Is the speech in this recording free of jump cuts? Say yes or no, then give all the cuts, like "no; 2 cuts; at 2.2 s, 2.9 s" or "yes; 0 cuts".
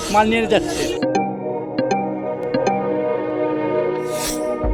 yes; 0 cuts